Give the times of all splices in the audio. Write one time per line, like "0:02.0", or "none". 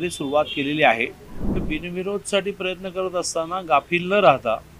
0:01.6

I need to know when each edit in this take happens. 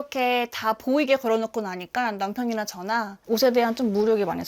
0:03.1

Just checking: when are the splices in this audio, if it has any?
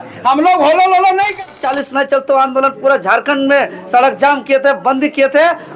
0:01.4

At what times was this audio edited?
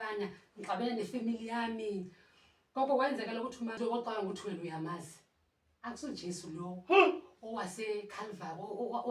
0:03.8

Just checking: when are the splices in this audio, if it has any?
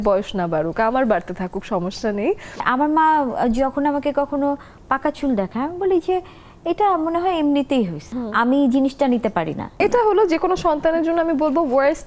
0:02.6
0:08.2
0:09.7

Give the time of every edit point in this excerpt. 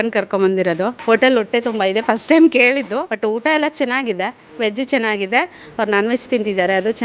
0:01.0
0:03.1
0:04.5

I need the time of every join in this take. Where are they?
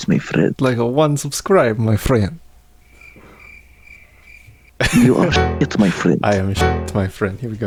none

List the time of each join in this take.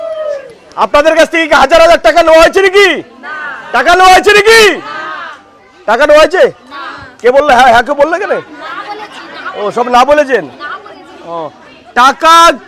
none

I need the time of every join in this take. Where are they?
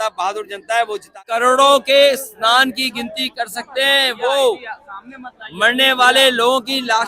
0:01.3

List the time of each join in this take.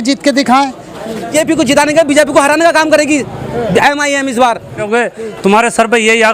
0:01.3
0:04.8

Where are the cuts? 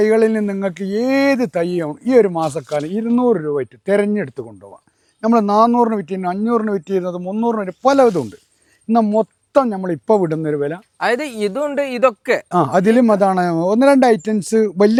none

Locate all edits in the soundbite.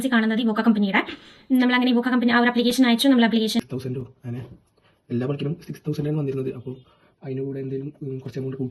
0:03.6

